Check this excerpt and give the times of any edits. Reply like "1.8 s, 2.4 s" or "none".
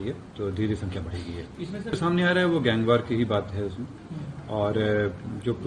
2.0 s